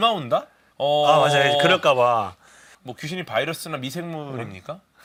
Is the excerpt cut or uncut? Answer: uncut